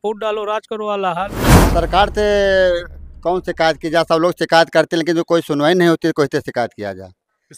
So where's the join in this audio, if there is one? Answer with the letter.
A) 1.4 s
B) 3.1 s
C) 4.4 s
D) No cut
A